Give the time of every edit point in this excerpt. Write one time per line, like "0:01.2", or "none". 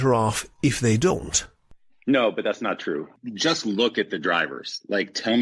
0:03.1